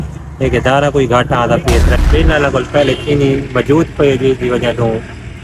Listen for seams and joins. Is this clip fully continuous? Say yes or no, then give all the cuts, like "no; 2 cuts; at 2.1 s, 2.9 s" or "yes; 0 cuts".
no; 1 cut; at 1.9 s